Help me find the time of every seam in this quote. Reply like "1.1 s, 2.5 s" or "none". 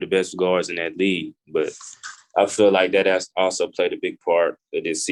1.4 s